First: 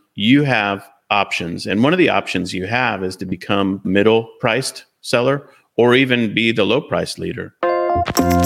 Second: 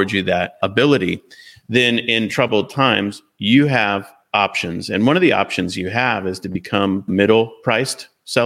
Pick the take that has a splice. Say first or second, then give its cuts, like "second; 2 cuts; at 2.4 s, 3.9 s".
first; 1 cut; at 7.5 s